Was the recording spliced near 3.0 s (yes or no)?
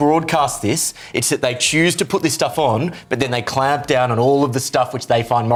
no